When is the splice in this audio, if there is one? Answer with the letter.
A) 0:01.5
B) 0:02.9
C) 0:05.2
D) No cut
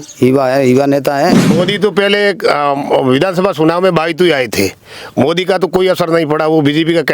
A